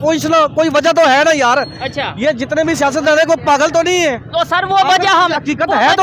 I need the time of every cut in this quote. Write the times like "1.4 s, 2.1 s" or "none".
none